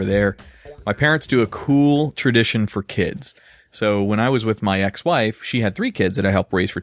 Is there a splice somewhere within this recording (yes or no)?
yes